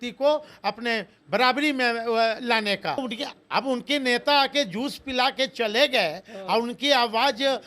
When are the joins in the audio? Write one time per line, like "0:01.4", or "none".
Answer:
0:03.0